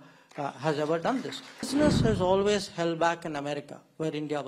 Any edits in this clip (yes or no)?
yes